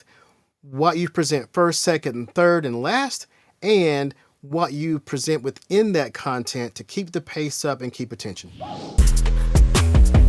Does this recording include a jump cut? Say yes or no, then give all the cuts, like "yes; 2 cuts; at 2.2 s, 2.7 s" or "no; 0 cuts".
yes; 1 cut; at 8.5 s